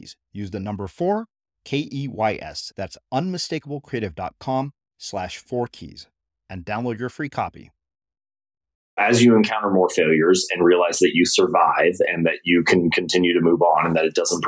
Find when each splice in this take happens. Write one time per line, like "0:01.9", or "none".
0:09.0